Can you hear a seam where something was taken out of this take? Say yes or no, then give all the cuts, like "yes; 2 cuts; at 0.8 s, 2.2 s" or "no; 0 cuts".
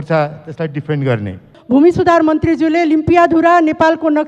yes; 1 cut; at 1.5 s